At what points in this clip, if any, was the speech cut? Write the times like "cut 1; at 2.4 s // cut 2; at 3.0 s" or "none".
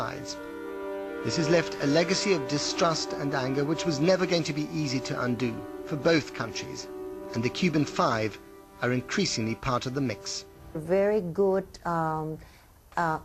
none